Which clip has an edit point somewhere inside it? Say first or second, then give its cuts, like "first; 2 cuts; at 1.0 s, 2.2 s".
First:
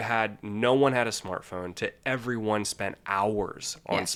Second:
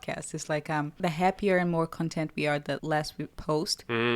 second; 2 cuts; at 1.0 s, 3.0 s